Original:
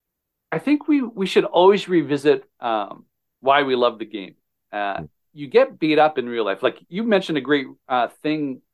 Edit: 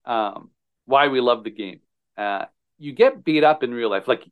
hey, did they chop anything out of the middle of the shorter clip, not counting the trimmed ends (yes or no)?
no